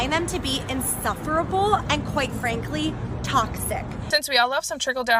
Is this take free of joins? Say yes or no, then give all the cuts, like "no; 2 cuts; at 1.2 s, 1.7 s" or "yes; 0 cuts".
no; 1 cut; at 3.9 s